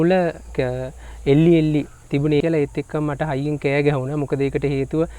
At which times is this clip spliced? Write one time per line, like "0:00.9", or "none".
0:02.4